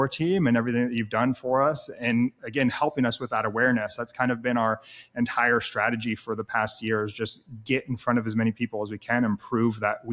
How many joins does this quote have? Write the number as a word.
zero